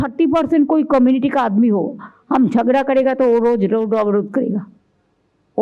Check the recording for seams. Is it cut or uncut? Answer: uncut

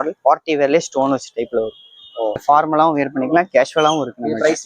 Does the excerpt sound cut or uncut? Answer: cut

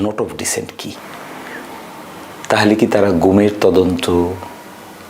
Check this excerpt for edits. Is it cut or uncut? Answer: cut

